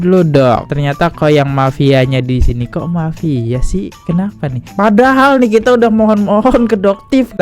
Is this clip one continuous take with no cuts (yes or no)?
no